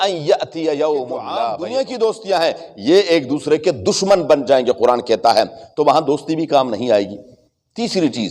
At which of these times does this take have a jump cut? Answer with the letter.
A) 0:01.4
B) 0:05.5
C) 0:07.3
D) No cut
A